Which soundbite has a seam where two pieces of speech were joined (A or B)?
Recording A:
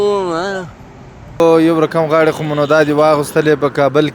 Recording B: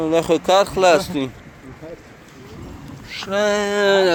A